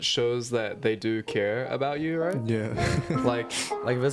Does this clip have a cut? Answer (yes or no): no